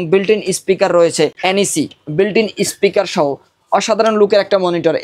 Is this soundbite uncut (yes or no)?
no